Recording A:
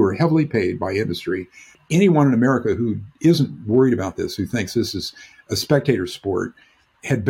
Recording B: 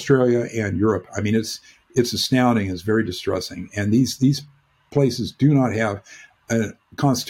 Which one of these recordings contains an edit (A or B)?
A